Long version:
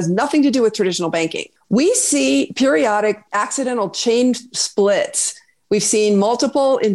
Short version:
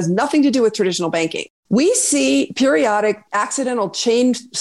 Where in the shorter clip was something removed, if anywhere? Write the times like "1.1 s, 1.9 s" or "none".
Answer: none